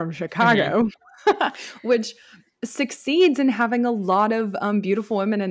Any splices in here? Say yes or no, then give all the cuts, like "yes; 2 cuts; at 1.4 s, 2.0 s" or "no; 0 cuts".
no; 0 cuts